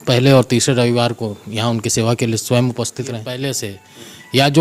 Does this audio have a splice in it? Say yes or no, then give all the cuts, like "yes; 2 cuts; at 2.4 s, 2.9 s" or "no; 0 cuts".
yes; 1 cut; at 3.4 s